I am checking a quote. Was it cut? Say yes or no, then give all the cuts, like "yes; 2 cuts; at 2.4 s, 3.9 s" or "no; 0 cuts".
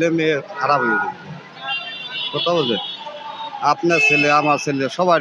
no; 0 cuts